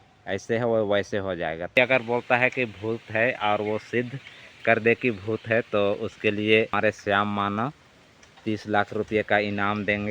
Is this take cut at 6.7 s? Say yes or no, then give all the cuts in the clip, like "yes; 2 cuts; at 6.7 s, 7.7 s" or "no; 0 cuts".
yes; 2 cuts; at 1.8 s, 6.7 s